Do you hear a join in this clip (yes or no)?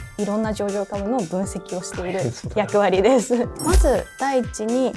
yes